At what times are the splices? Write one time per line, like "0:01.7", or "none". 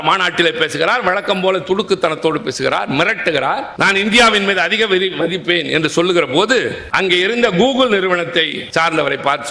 0:03.7
0:06.8
0:08.6